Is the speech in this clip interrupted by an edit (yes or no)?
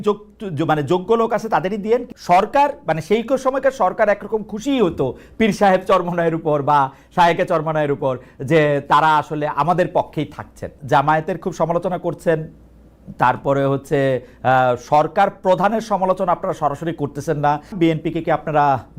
yes